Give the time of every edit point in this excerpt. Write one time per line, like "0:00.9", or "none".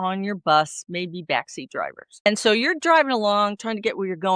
0:02.3